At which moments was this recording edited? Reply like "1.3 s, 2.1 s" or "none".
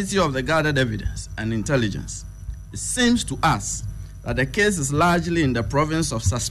none

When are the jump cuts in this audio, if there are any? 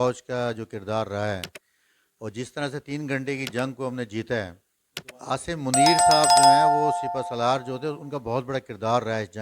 5.7 s, 6.9 s

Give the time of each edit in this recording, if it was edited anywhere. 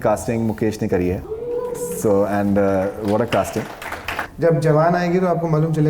1.3 s, 4.2 s

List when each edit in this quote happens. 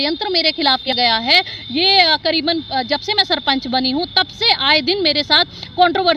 0.9 s

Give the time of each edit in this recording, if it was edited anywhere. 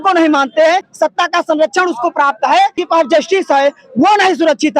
0.9 s, 2.8 s

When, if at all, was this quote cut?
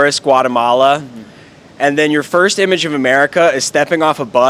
none

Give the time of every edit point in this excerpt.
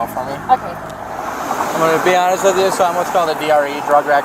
1.4 s

